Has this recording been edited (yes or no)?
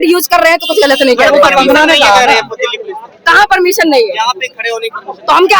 no